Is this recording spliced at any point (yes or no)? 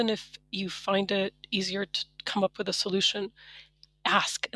no